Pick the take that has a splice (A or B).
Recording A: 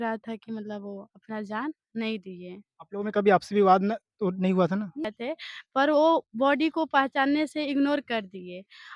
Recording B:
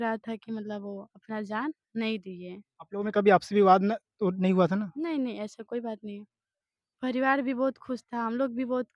A